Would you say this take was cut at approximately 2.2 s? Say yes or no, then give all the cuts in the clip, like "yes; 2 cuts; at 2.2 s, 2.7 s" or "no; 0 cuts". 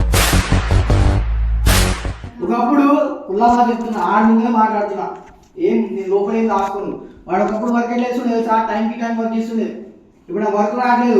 yes; 1 cut; at 2.2 s